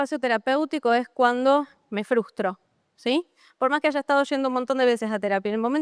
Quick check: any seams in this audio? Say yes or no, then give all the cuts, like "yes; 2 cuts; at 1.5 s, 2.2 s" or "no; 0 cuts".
no; 0 cuts